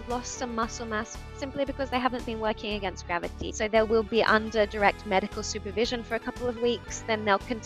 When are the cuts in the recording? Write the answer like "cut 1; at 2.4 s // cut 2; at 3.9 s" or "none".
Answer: cut 1; at 3.4 s